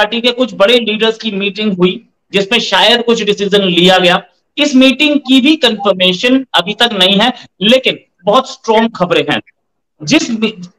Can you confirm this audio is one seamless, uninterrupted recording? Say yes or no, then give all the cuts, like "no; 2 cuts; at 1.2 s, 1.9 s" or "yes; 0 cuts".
yes; 0 cuts